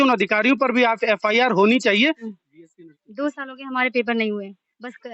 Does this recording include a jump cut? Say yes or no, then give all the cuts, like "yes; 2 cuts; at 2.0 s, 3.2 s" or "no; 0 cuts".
yes; 1 cut; at 2.3 s